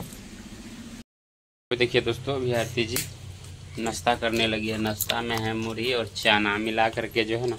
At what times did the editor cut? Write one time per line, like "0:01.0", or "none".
0:01.1

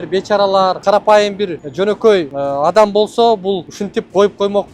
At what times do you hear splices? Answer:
0:00.8
0:01.6
0:02.3
0:03.7

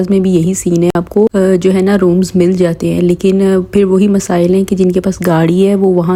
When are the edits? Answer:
none

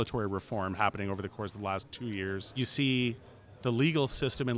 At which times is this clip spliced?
0:02.5

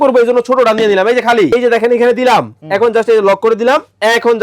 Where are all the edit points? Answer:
0:01.5

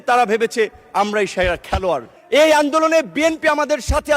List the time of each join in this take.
0:02.1

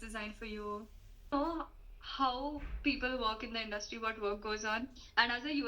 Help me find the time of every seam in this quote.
0:01.3

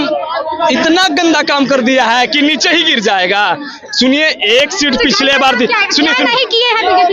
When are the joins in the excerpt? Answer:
none

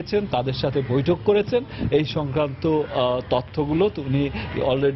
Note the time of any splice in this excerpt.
none

